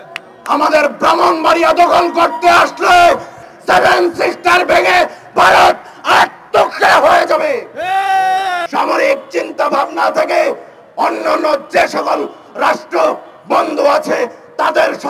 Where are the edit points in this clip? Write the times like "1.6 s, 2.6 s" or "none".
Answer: 3.4 s, 8.7 s